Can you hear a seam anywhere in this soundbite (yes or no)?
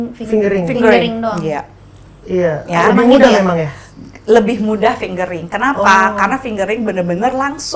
no